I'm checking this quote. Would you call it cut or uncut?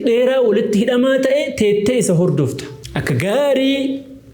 cut